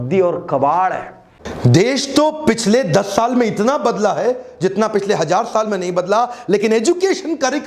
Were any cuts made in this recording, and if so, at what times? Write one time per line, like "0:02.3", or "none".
0:01.4